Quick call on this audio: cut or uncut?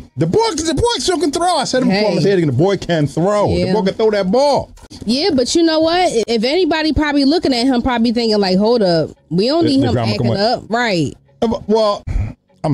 uncut